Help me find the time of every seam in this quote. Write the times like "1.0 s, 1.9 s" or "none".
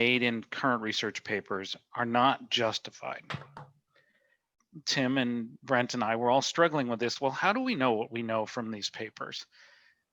4.5 s